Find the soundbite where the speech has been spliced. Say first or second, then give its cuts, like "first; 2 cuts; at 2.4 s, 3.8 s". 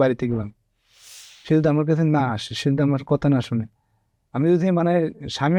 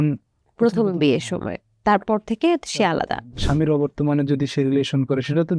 second; 1 cut; at 3.4 s